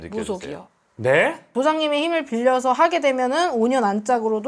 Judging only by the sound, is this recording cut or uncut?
cut